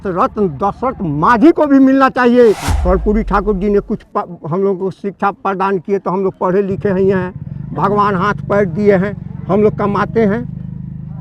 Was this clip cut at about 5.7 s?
no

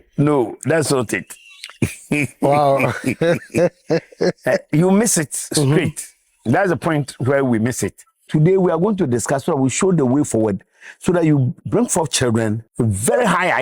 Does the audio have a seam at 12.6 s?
yes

